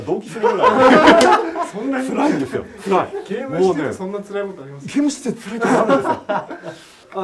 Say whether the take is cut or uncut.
uncut